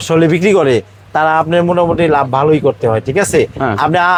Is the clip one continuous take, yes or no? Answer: yes